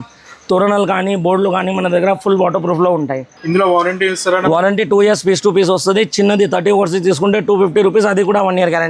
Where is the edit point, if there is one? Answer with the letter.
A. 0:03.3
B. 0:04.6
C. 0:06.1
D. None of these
A